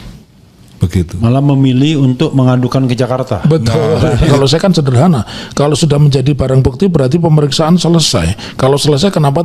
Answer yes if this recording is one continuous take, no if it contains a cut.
no